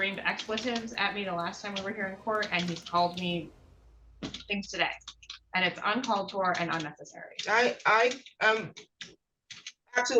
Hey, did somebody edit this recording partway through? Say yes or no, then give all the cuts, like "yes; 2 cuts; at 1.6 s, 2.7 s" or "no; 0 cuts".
no; 0 cuts